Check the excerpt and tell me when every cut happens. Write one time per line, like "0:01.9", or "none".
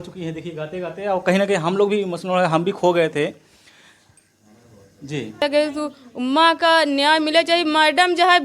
0:05.4

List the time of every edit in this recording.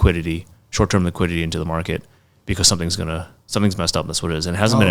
none

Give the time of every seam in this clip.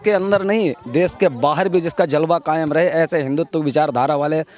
none

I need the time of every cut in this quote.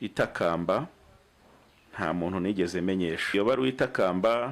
0:03.2

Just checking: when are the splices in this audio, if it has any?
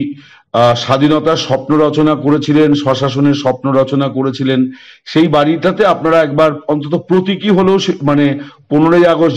none

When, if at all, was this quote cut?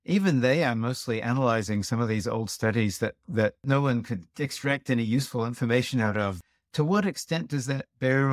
0:03.6
0:06.4

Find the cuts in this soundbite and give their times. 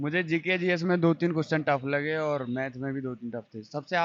none

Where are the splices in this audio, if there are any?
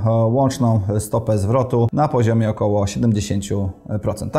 0:01.9

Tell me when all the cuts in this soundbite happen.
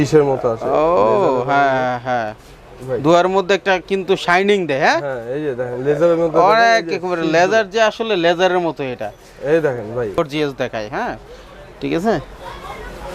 0:10.2

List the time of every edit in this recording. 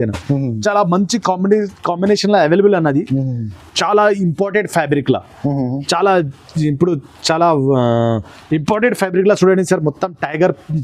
0:03.6

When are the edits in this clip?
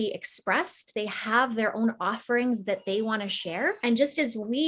0:03.8

